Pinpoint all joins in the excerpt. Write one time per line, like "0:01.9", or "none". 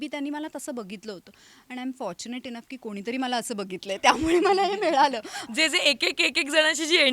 0:05.4